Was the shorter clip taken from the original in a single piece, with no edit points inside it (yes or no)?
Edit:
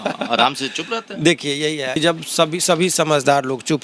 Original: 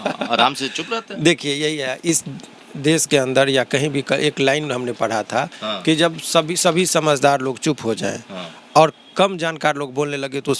no